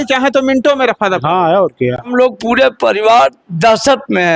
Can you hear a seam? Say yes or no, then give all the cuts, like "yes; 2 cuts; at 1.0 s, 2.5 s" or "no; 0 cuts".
yes; 1 cut; at 2.1 s